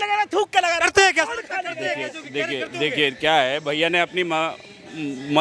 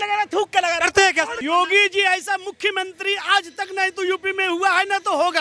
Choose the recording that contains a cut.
second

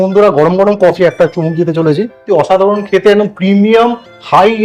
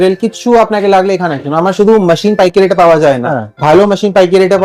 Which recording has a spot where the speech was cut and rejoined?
first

